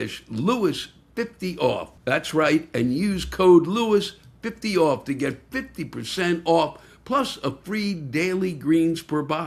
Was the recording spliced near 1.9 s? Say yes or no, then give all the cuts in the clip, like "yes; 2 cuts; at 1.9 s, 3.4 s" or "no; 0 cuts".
no; 0 cuts